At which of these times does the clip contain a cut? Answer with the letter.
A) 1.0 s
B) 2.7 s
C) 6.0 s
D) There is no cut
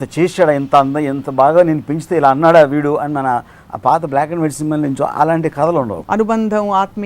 C